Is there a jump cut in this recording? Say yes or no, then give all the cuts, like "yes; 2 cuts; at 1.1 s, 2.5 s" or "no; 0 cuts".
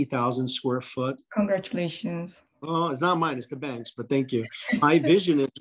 yes; 2 cuts; at 1.2 s, 4.8 s